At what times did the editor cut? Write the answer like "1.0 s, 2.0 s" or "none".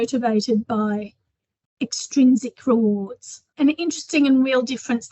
3.5 s